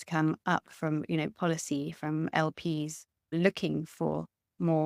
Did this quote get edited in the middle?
yes; 1 cut; at 3.3 s

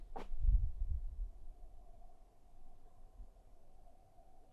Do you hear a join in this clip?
no; 0 cuts

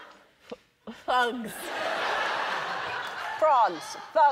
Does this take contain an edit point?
yes; 1 cut; at 1.9 s

